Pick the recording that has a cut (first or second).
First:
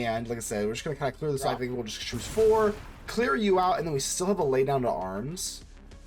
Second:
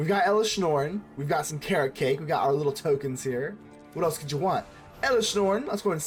first